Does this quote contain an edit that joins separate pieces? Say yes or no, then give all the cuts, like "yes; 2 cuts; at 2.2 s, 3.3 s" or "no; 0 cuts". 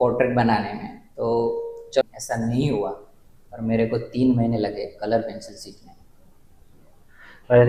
no; 0 cuts